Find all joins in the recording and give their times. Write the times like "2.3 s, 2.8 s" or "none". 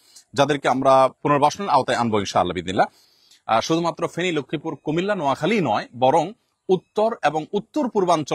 1.2 s, 3.1 s